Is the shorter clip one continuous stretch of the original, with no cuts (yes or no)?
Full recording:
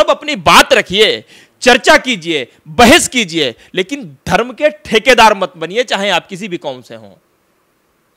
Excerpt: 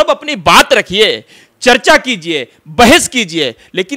yes